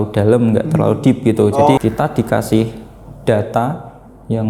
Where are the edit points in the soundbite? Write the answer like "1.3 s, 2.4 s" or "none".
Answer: 1.8 s